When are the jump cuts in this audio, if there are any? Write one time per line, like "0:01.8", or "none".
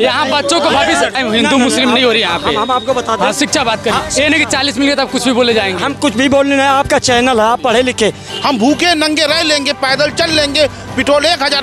0:01.1
0:08.2